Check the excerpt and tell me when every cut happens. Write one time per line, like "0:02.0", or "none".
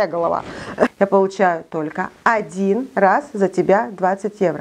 0:00.9